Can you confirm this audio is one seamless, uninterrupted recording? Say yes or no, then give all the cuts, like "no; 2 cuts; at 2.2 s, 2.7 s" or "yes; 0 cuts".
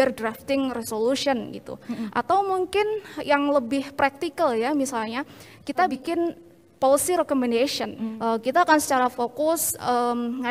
no; 2 cuts; at 6.0 s, 8.1 s